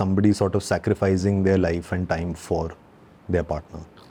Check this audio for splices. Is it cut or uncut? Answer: uncut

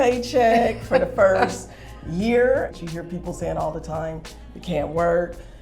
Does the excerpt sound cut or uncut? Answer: cut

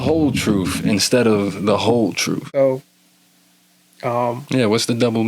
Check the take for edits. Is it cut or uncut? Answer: cut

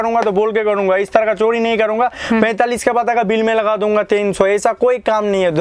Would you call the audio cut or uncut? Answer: uncut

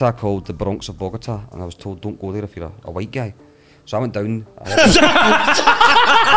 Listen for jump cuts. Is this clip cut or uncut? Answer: uncut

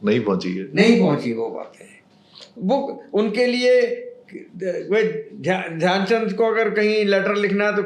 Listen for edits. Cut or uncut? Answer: uncut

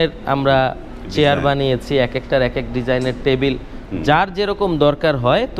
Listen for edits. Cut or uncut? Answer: uncut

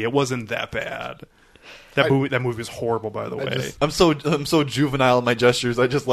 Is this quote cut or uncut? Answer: cut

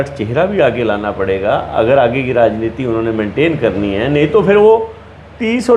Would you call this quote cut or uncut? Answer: uncut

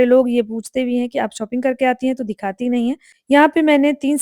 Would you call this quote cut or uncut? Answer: cut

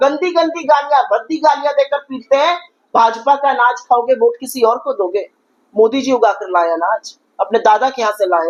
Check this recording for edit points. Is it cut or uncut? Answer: uncut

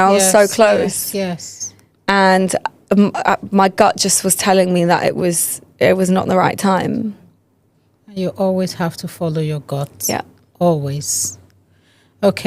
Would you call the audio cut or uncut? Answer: uncut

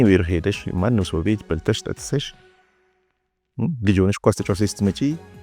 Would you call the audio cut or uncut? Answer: uncut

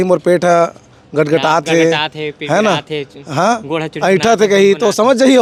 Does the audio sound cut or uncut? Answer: uncut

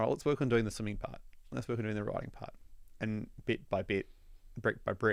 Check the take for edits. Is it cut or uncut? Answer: uncut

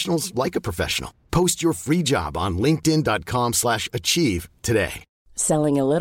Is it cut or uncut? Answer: cut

